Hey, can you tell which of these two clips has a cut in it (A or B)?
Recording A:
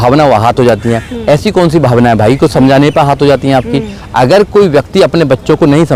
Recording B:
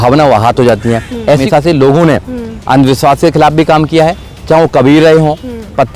B